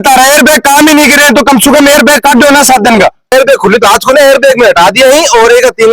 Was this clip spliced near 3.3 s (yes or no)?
yes